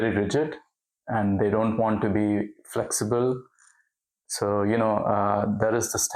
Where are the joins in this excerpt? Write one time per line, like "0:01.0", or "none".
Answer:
none